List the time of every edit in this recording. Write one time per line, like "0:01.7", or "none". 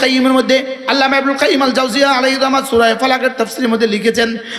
none